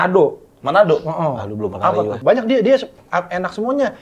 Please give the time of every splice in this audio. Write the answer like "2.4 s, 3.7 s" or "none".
2.2 s